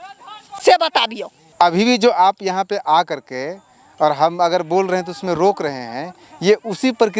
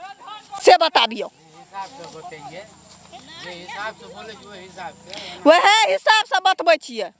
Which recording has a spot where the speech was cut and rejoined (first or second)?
first